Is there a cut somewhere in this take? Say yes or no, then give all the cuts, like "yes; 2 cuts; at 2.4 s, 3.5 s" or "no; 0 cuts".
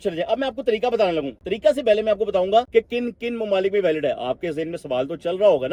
no; 0 cuts